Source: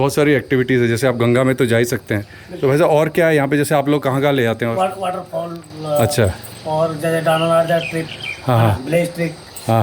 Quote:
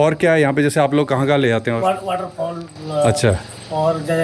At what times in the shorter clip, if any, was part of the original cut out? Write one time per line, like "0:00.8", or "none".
none